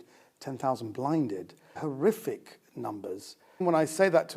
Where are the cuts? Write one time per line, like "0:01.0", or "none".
0:01.8
0:03.6